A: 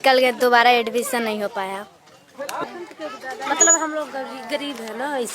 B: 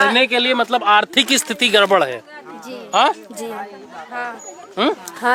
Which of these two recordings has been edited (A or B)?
A